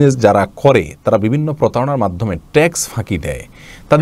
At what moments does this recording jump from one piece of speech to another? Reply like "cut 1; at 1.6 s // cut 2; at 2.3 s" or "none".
none